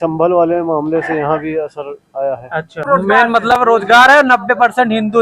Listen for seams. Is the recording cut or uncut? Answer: cut